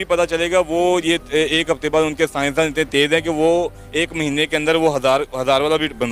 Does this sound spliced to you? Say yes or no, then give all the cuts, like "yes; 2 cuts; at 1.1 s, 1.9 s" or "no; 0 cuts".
no; 0 cuts